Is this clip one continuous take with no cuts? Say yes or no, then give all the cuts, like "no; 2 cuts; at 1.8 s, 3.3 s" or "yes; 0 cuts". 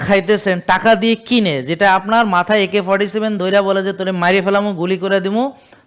yes; 0 cuts